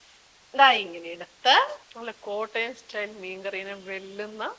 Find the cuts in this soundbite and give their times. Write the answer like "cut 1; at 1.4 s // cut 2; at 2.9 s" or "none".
cut 1; at 1.8 s